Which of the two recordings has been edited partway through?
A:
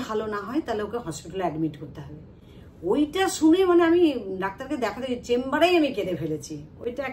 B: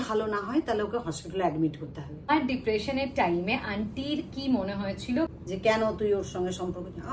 B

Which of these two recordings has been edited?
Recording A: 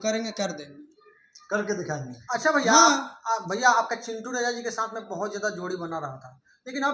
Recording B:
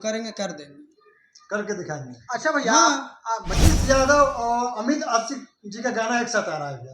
B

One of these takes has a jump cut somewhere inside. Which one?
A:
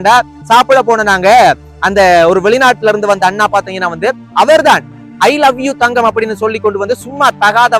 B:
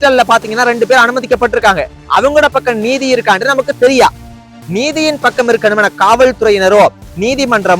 B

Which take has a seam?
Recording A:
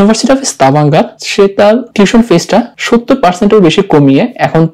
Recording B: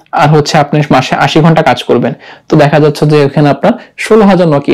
A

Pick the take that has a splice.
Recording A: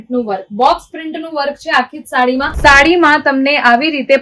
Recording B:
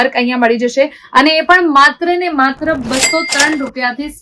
A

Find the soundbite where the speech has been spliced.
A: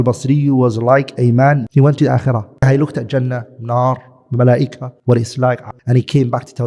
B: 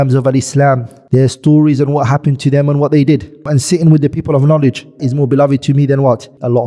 A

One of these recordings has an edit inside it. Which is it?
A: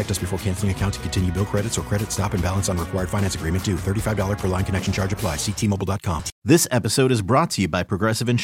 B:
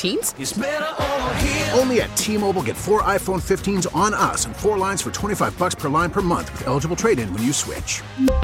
A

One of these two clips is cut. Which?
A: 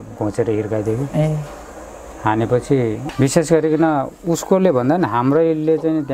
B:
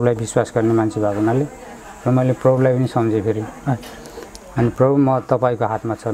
A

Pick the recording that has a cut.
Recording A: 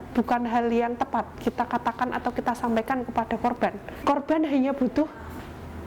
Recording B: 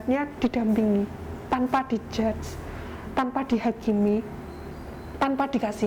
A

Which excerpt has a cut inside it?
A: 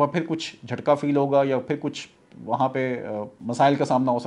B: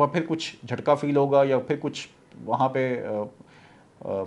A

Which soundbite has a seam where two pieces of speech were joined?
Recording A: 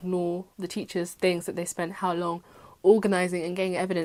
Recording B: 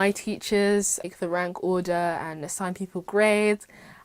B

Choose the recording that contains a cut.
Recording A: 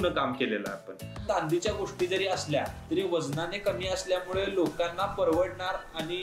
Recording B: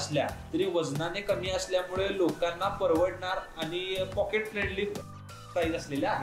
A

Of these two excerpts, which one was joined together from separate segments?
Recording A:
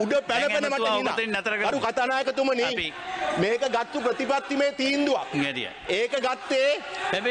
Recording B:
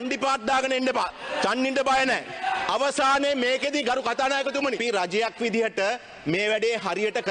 B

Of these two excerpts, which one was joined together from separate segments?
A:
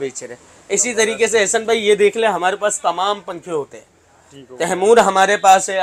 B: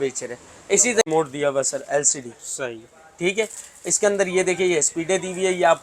B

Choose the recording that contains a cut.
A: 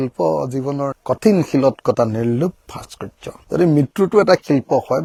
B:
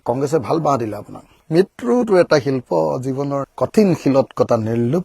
B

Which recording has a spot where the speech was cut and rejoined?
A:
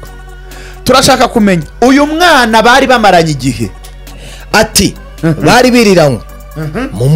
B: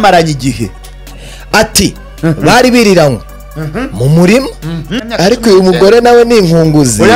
B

